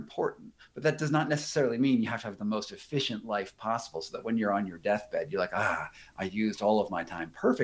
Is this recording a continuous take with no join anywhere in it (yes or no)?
yes